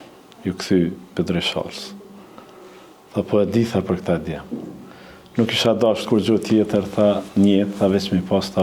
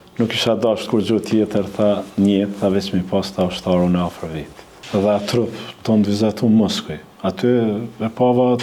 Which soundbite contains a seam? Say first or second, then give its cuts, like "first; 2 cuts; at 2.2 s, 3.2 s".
second; 1 cut; at 4.7 s